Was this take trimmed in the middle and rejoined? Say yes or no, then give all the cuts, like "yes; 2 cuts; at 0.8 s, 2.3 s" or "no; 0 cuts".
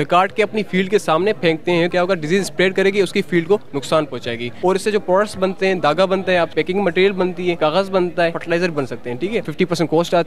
yes; 6 cuts; at 1.9 s, 4.5 s, 6.5 s, 7.6 s, 8.4 s, 9.5 s